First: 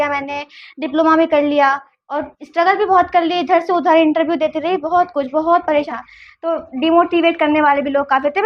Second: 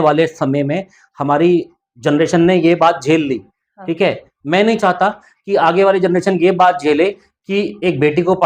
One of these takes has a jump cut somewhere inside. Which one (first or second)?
first